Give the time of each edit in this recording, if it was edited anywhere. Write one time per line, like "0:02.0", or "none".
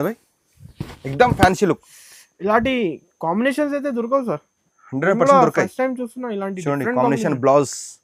none